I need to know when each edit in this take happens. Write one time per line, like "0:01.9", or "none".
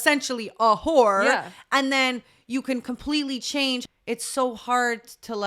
0:03.8